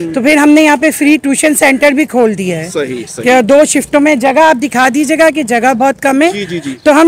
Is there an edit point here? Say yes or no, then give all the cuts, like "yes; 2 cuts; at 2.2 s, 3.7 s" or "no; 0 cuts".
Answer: no; 0 cuts